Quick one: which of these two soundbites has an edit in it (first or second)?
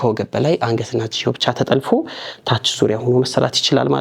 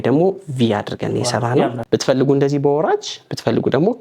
second